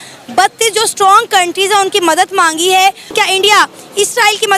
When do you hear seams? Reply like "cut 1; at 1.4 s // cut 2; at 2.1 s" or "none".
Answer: cut 1; at 3.1 s